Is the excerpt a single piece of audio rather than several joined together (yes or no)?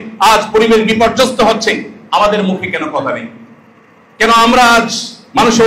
yes